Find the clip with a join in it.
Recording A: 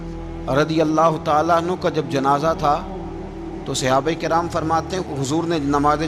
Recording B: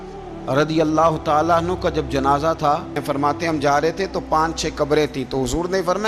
B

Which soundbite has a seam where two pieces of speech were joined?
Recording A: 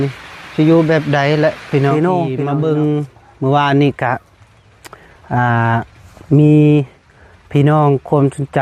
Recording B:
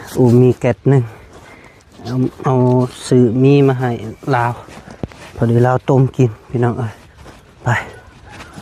A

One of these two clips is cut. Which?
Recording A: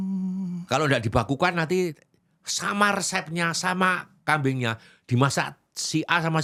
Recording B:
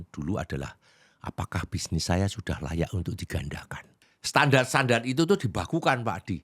B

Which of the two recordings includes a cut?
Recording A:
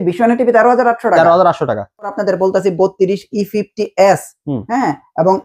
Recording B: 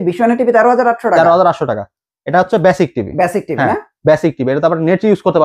A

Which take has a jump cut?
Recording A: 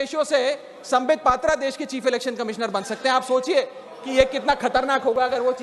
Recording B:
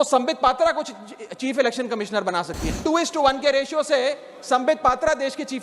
B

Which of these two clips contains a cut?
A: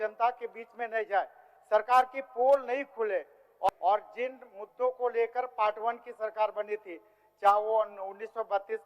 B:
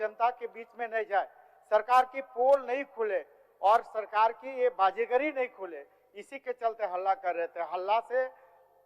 A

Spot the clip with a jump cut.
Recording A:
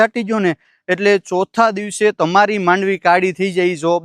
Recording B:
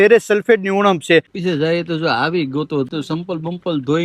B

